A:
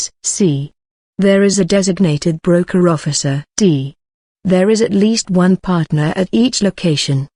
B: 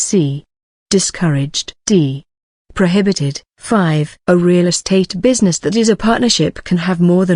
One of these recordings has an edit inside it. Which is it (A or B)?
B